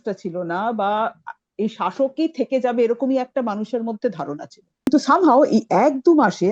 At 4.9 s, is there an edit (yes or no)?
yes